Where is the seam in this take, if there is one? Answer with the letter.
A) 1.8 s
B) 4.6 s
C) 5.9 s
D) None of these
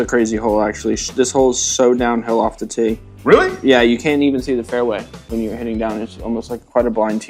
D